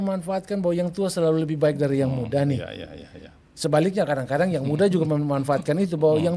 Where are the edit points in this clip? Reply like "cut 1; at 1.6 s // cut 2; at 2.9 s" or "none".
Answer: none